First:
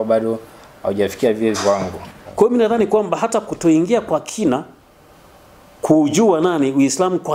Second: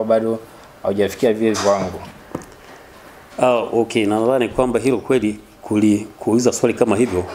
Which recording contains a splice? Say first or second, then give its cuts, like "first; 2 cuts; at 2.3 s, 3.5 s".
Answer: first; 1 cut; at 2.2 s